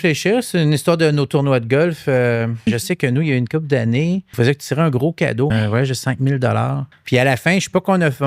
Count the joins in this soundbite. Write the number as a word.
four